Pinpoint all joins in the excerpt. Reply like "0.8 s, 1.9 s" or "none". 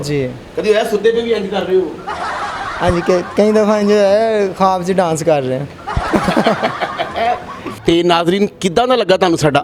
none